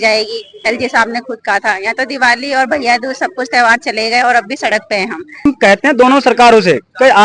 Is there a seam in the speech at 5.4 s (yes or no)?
yes